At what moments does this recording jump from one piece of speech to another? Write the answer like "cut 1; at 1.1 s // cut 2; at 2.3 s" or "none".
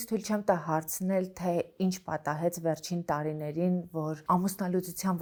none